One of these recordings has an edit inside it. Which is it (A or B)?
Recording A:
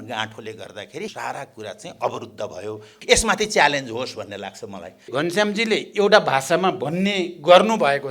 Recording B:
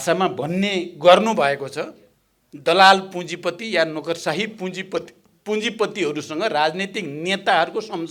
A